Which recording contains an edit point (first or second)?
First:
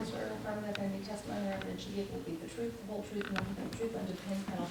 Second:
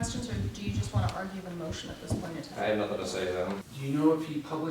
second